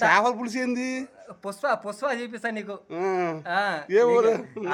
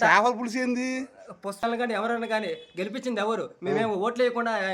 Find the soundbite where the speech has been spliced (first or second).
second